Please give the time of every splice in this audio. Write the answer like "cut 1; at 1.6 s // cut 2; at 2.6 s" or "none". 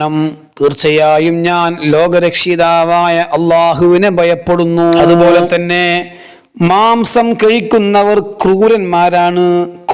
cut 1; at 5.2 s